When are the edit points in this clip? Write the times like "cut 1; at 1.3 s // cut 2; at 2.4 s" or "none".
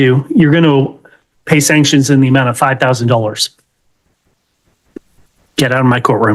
none